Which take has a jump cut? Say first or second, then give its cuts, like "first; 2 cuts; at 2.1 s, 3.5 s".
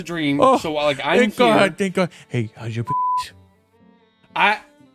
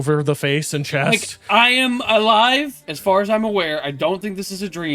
second; 1 cut; at 2.7 s